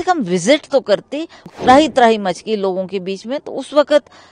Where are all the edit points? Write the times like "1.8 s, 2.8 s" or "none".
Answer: 1.5 s

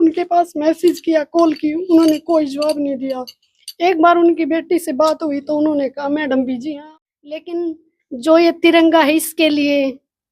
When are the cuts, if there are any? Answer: 6.7 s

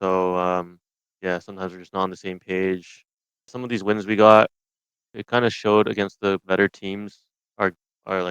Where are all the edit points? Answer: 3.6 s, 5.2 s

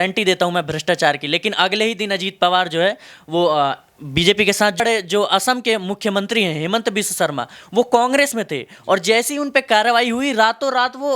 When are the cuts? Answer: 4.8 s

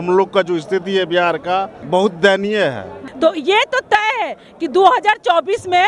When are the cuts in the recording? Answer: 1.8 s, 3.0 s

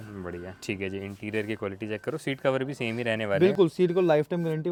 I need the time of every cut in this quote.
none

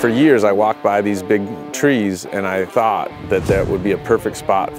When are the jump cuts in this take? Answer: 2.7 s

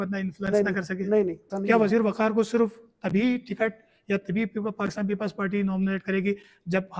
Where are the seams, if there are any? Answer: 1.5 s

